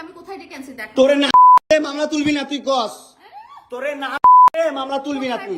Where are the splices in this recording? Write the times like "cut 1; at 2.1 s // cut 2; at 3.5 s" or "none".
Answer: none